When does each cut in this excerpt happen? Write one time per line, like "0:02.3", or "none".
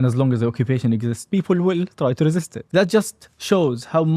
0:01.2
0:02.6